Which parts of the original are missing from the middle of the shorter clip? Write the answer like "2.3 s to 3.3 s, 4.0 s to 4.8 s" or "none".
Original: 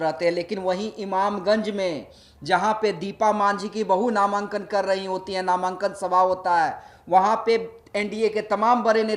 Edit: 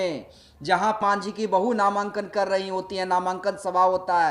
2.8 s to 3.4 s